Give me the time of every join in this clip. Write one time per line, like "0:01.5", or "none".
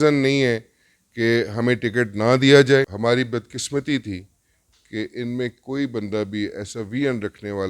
0:02.9

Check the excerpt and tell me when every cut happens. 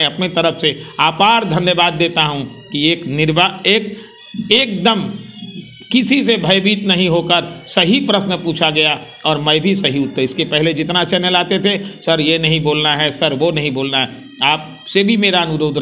none

